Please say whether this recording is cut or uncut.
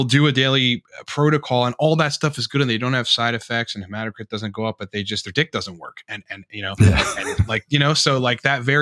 uncut